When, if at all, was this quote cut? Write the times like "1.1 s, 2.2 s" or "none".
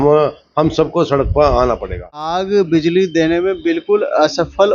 2.4 s